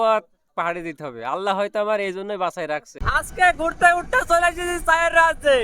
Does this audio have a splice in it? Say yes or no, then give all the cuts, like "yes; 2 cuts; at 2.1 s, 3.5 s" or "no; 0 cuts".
yes; 1 cut; at 2.9 s